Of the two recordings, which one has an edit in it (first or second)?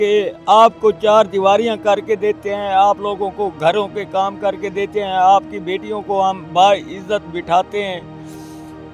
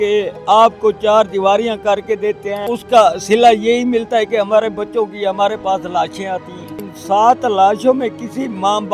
second